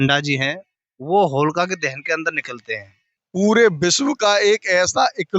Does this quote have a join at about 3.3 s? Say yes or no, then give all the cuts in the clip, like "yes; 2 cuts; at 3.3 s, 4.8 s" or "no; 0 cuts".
yes; 1 cut; at 3.3 s